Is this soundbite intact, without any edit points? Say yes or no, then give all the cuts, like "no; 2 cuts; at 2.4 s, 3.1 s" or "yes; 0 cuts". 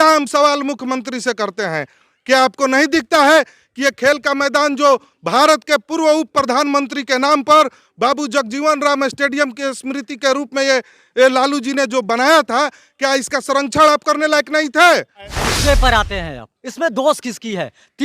no; 1 cut; at 15.5 s